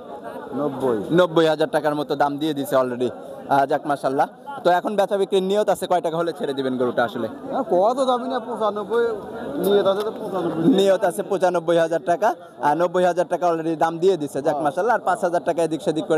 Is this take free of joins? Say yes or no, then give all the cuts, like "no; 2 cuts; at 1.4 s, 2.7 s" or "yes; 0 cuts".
yes; 0 cuts